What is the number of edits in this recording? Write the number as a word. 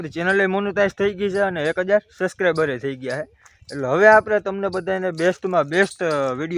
zero